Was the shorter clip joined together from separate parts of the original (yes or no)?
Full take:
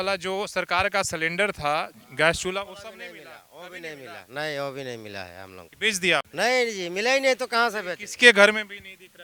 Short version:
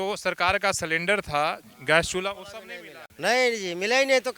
yes